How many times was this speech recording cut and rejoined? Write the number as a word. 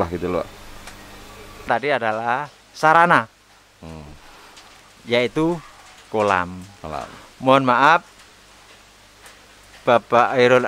one